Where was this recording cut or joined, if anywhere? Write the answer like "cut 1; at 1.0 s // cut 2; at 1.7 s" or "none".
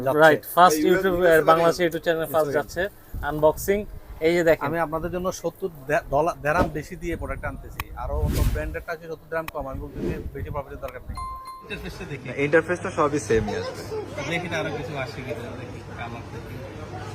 cut 1; at 11.7 s